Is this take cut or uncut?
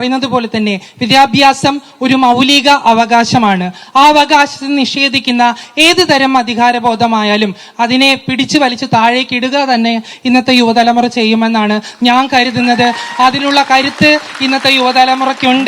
uncut